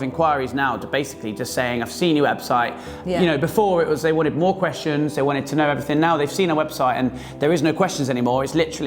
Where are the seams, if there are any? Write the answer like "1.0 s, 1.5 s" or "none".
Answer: none